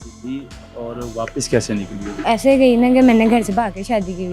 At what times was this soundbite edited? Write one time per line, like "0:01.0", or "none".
0:02.2

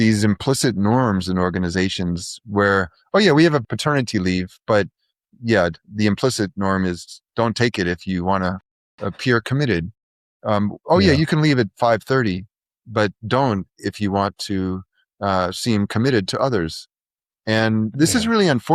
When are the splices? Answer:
0:03.7

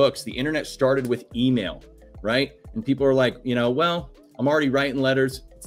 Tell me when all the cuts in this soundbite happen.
none

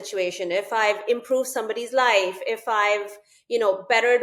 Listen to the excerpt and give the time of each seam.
none

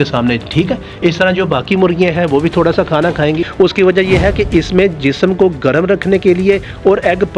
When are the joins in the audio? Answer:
0:03.4

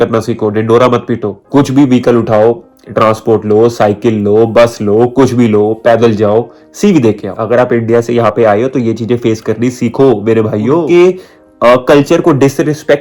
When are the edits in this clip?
0:01.3
0:07.3
0:10.8

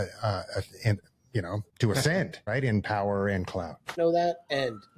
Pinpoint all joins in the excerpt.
0:01.7
0:02.4
0:03.9

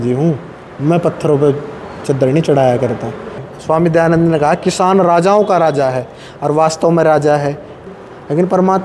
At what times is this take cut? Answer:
0:03.4
0:07.8

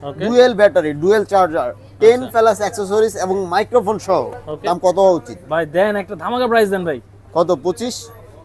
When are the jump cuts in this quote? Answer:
0:04.7

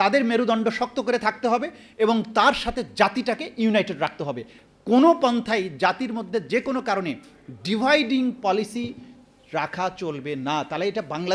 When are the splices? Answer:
none

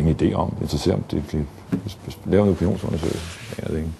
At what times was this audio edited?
none

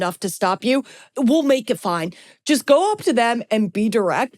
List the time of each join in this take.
0:01.1

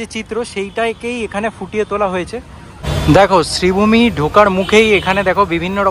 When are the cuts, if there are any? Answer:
0:02.7

